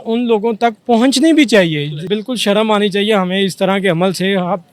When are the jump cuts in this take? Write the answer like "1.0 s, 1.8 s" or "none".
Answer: 2.1 s